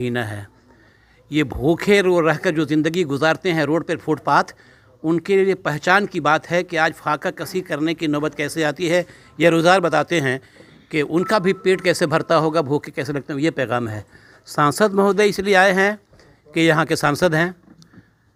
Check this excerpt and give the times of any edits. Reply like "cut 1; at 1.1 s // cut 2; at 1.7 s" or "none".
none